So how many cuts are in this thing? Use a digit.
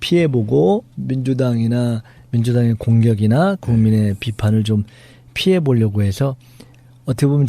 1